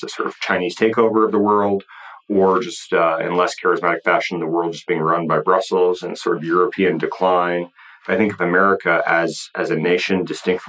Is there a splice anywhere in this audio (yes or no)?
no